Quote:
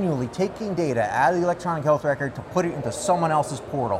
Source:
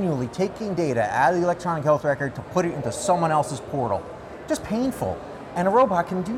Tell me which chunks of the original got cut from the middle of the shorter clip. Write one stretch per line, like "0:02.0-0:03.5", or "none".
none